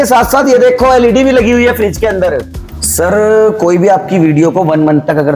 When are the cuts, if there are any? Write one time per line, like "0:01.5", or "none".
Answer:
0:02.5